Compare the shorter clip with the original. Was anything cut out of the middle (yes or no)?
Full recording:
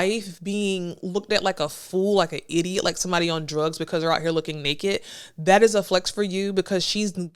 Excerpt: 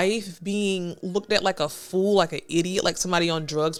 no